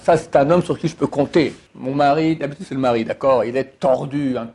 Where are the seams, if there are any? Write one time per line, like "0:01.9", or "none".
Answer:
0:01.7